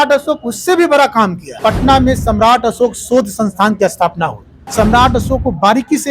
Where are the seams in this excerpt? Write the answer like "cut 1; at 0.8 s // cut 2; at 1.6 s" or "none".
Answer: cut 1; at 1.5 s // cut 2; at 4.6 s